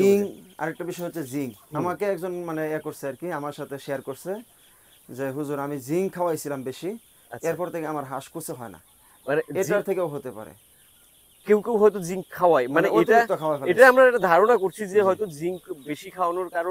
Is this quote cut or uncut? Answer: uncut